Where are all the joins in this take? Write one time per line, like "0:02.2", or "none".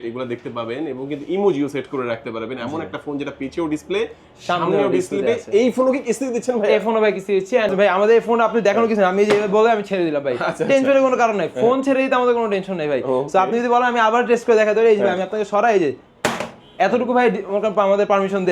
0:07.7